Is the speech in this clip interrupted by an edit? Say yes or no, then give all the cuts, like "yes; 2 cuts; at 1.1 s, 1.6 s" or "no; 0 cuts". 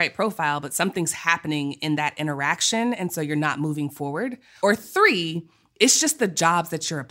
yes; 1 cut; at 4.4 s